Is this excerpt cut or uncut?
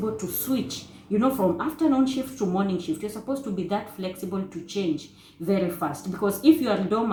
uncut